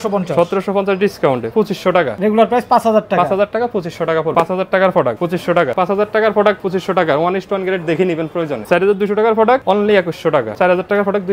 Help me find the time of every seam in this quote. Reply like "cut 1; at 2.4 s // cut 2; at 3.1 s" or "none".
cut 1; at 2.0 s // cut 2; at 4.3 s // cut 3; at 5.7 s // cut 4; at 6.6 s // cut 5; at 8.6 s // cut 6; at 10.5 s